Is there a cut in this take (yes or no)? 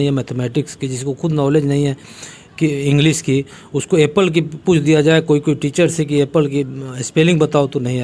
no